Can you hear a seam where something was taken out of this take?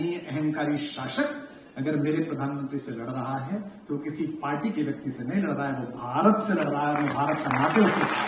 no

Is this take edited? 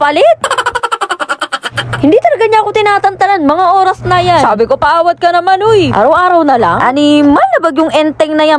no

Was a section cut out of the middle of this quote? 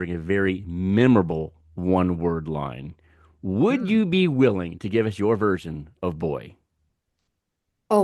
no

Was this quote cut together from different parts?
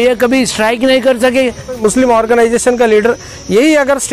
yes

